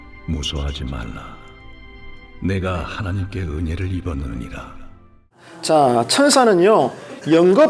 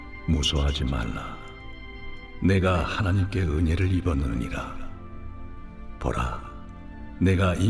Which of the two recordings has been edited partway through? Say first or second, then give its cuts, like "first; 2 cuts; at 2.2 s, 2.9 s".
second; 1 cut; at 5.5 s